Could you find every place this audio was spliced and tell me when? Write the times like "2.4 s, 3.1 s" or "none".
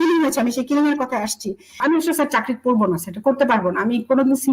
1.8 s